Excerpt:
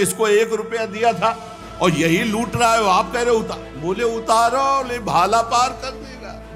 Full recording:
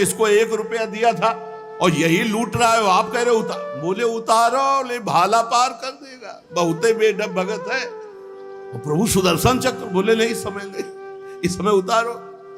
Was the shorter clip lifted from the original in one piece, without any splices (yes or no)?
yes